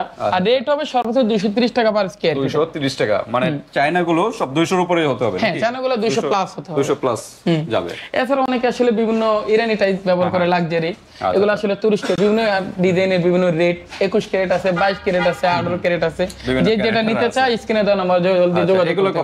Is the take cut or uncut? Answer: uncut